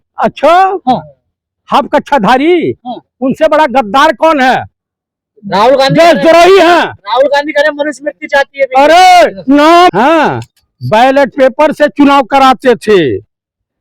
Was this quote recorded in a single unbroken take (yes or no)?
no